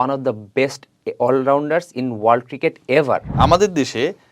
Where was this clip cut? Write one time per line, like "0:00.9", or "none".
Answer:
0:03.3

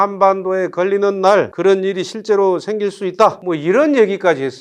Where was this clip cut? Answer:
none

